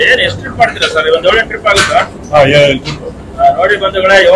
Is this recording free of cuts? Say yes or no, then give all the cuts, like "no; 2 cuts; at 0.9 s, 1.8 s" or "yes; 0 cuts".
yes; 0 cuts